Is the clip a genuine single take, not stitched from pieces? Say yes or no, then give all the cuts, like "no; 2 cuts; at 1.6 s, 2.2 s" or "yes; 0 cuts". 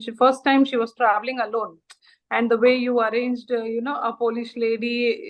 no; 1 cut; at 2.1 s